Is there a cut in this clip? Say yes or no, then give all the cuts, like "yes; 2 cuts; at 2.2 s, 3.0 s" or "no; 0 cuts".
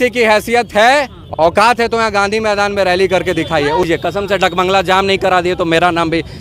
yes; 2 cuts; at 1.6 s, 3.8 s